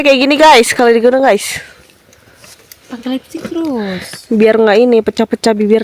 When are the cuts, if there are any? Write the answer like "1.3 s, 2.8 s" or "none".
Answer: none